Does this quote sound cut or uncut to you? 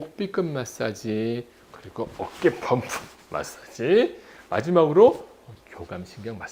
uncut